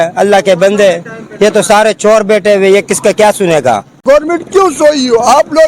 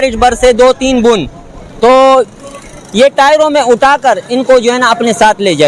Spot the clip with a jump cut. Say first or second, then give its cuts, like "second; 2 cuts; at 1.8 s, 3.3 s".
first; 1 cut; at 4.0 s